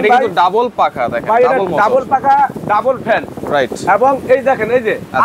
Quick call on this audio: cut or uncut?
uncut